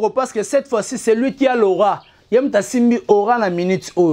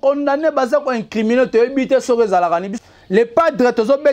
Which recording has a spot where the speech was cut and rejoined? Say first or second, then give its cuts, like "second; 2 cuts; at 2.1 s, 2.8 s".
second; 1 cut; at 2.7 s